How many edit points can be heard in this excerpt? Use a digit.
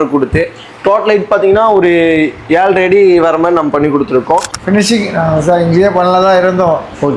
1